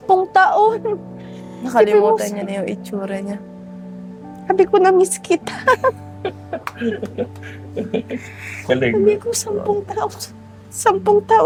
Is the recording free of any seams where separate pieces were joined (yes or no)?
yes